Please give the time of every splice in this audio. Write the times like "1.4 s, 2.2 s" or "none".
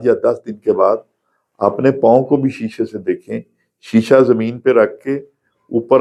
none